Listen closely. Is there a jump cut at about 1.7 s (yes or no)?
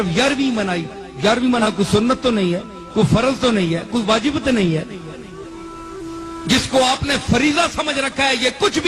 yes